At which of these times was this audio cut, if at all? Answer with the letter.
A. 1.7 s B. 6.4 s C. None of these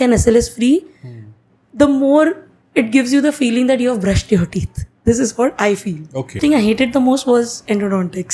B